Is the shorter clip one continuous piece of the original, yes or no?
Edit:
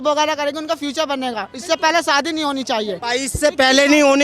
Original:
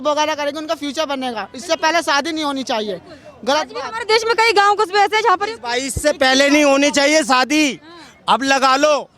no